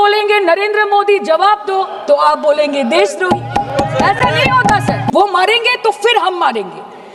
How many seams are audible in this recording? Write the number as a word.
one